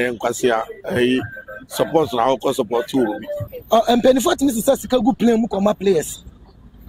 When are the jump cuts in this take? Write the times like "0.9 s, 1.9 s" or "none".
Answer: 3.5 s